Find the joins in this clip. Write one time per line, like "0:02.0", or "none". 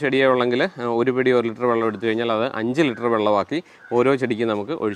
none